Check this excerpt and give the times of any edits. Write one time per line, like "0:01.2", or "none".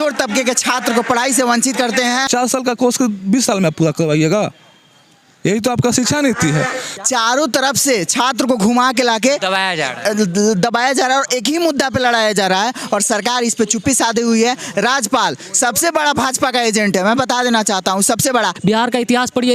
0:02.3
0:06.9
0:18.5